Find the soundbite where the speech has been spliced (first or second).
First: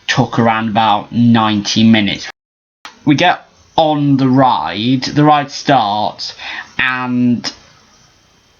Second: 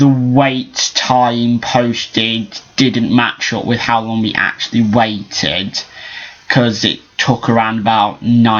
first